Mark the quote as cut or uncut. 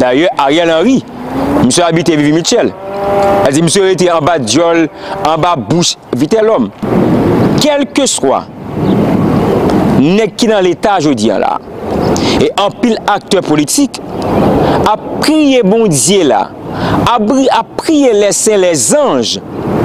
cut